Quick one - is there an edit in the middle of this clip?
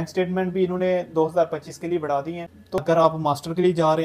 yes; 1 cut; at 2.8 s

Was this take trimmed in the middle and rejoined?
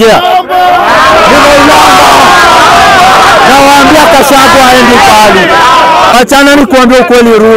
yes; 1 cut; at 6.1 s

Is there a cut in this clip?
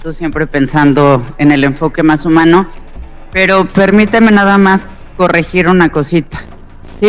no; 0 cuts

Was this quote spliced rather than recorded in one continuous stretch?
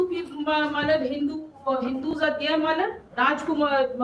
yes; 1 cut; at 3.0 s

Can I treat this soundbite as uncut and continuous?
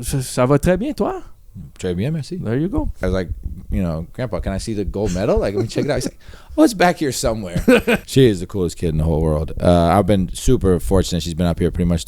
no; 2 cuts; at 3.0 s, 8.0 s

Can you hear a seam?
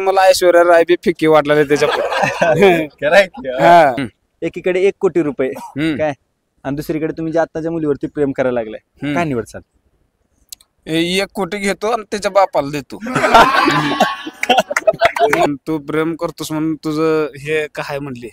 yes; 2 cuts; at 4.1 s, 15.5 s

